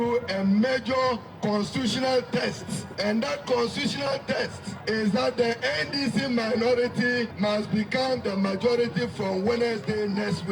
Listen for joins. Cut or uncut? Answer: cut